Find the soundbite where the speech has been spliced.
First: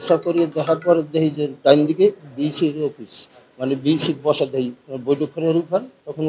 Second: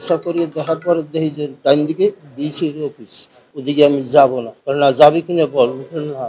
second; 1 cut; at 3.5 s

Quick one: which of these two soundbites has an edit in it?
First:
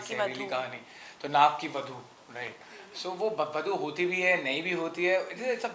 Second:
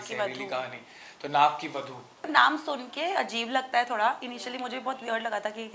second; 1 cut; at 2.2 s

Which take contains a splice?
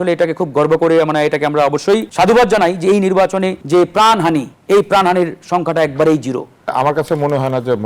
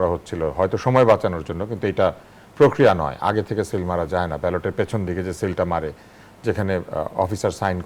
first; 4 cuts; at 2.1 s, 3.6 s, 4.5 s, 6.7 s

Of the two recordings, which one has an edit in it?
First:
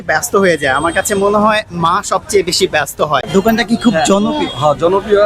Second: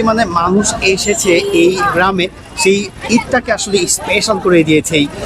first; 1 cut; at 3.3 s

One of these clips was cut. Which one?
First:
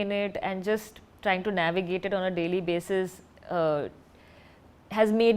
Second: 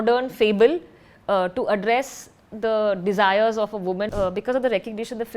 second; 1 cut; at 4.1 s

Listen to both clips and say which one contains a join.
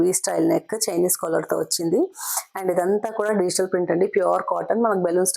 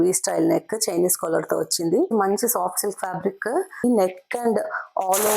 second; 2 cuts; at 2.1 s, 3.8 s

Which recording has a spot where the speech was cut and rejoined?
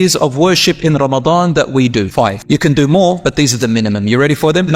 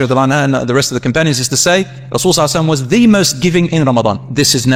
first; 1 cut; at 2.4 s

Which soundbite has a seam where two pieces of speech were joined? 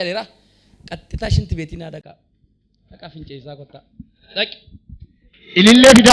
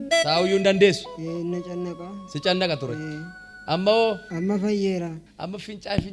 second; 2 cuts; at 4.3 s, 5.2 s

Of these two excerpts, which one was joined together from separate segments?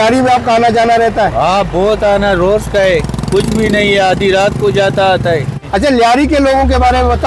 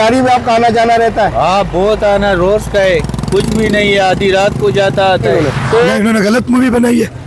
second; 1 cut; at 5.3 s

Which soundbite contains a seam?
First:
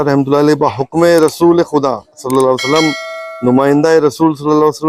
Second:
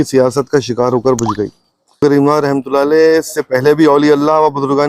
second; 1 cut; at 2.0 s

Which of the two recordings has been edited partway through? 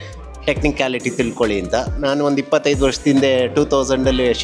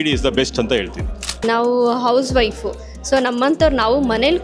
second; 1 cut; at 1.4 s

